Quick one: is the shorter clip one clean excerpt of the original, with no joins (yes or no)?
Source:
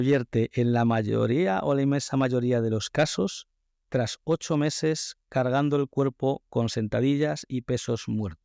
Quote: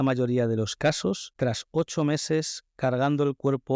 no